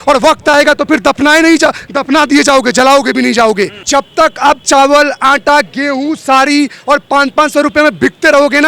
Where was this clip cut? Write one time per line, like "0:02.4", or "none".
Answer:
0:03.8